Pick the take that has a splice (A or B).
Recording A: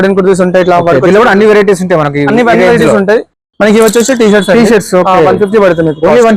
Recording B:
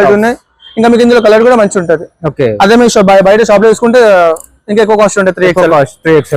A